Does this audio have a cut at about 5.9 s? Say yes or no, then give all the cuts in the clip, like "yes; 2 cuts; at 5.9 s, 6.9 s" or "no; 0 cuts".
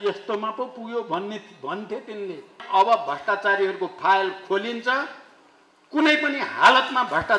no; 1 cut; at 2.6 s